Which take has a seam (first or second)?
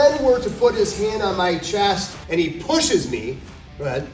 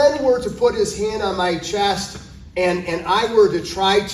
first